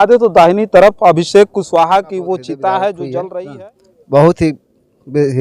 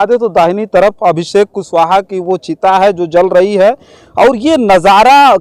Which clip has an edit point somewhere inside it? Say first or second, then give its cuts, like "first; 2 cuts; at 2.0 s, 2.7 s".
first; 1 cut; at 3.4 s